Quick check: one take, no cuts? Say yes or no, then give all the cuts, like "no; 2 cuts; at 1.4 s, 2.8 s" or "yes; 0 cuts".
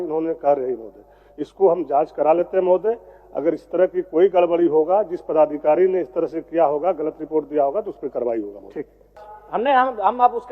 no; 1 cut; at 9.2 s